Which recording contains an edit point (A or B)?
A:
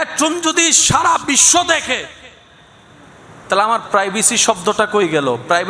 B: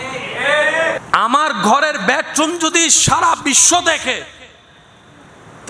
B